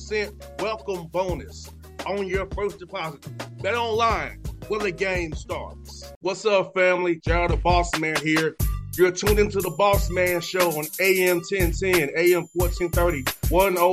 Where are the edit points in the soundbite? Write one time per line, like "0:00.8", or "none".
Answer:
none